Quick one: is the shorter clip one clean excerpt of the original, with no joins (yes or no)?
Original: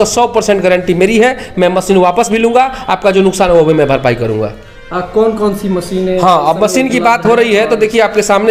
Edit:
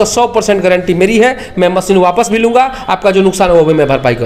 yes